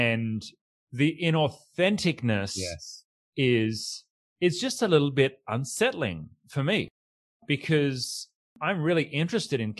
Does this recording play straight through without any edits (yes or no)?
no